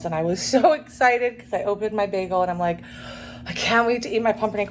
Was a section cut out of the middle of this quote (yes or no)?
no